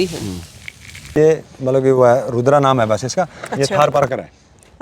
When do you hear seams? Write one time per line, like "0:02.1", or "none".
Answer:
0:01.1